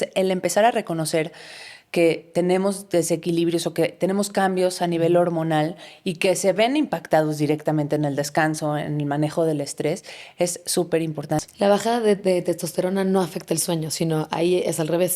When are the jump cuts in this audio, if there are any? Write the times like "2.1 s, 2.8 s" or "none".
11.4 s